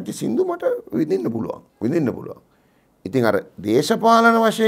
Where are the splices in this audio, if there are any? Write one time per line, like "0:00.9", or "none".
0:01.7